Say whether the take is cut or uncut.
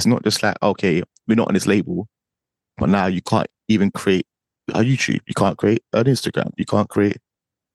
uncut